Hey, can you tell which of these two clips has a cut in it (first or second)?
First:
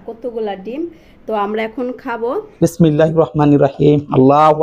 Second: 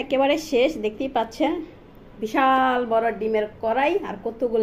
first